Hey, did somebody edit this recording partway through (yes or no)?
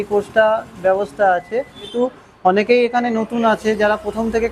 yes